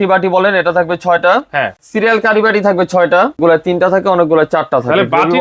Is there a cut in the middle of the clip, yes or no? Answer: yes